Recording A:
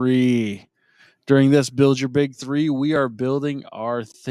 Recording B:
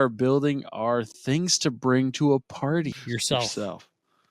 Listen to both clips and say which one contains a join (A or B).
B